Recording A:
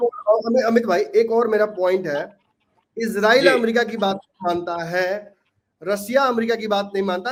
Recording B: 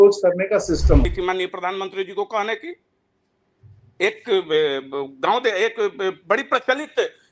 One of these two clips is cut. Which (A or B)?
B